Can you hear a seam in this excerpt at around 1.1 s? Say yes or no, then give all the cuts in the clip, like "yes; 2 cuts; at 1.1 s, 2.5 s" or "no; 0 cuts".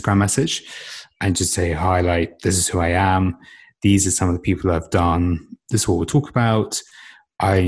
yes; 2 cuts; at 1.1 s, 5.6 s